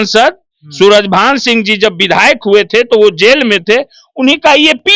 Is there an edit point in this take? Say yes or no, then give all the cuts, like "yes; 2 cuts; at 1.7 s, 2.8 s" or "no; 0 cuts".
no; 0 cuts